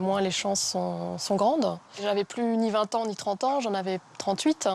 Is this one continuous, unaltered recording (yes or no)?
no